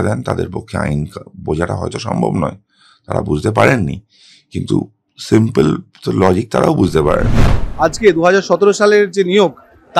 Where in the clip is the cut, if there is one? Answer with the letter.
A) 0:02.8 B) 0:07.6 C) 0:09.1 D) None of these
B